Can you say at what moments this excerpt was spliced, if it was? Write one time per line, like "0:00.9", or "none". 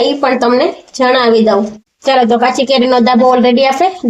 0:01.8